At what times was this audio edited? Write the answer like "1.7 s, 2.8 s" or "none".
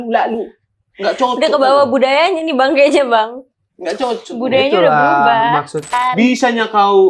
5.9 s